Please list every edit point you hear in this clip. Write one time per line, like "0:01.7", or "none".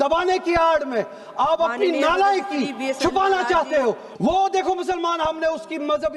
0:04.1